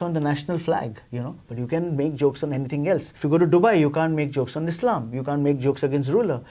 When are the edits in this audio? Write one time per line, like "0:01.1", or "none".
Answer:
0:03.1